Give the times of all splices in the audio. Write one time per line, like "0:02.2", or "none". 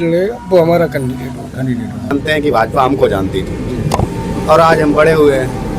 0:02.1